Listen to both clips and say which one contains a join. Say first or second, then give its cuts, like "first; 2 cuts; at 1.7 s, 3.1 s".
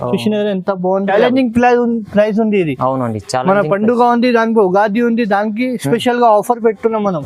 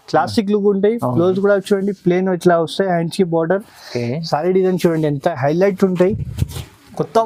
first; 1 cut; at 1.1 s